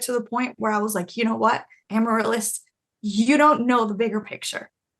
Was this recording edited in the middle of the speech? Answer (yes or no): yes